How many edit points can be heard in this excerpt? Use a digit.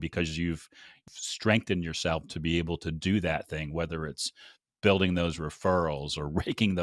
1